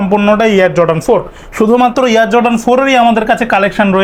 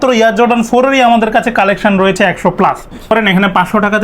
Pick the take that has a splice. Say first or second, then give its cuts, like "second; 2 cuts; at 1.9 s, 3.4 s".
second; 1 cut; at 3.1 s